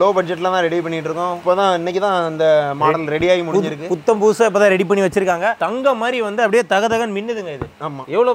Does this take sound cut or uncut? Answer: uncut